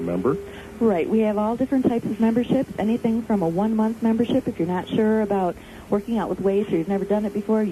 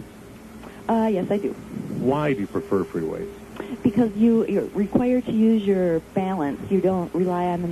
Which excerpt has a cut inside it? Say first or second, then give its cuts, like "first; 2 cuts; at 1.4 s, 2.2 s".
first; 1 cut; at 2.9 s